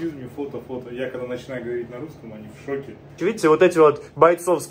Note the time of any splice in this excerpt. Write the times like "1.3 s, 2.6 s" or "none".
3.2 s

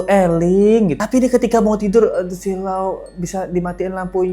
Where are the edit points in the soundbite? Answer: 1.0 s

